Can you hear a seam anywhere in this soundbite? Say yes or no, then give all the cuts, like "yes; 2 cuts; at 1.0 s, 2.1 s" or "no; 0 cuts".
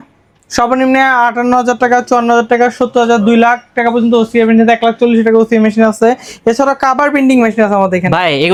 no; 0 cuts